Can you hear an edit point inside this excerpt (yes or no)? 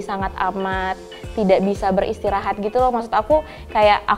no